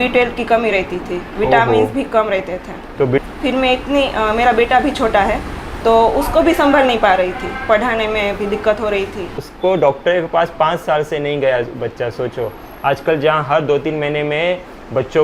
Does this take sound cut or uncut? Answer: cut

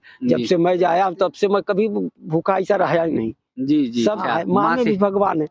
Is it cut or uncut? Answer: cut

